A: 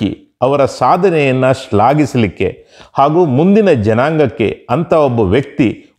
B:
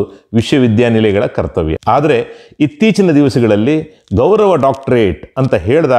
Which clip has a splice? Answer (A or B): B